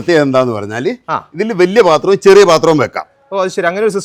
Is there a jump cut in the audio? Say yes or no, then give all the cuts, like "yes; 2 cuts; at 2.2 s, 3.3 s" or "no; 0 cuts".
no; 0 cuts